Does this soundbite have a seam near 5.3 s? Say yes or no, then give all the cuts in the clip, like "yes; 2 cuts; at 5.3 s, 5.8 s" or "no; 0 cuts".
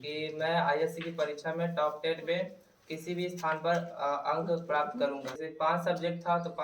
yes; 1 cut; at 5.3 s